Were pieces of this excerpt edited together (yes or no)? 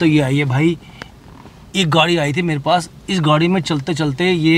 no